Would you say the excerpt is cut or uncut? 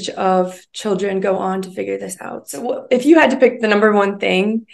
cut